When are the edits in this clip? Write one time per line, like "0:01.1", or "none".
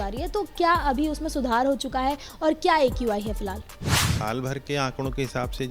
0:04.0